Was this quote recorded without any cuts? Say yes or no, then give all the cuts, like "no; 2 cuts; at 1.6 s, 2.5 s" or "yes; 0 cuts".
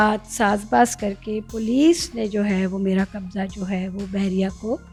yes; 0 cuts